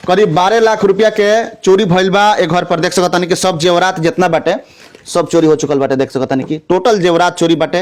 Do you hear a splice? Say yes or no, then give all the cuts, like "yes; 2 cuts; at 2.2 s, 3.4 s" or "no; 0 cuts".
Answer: no; 0 cuts